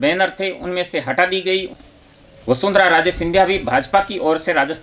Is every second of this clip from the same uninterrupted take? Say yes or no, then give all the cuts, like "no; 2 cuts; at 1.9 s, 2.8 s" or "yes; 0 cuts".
no; 1 cut; at 1.7 s